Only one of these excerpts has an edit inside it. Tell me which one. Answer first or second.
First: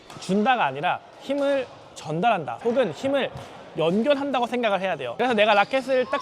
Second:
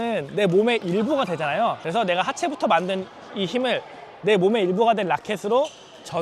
first